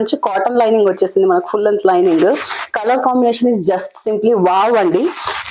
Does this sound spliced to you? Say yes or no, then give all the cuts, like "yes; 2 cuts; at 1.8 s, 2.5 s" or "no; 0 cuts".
no; 0 cuts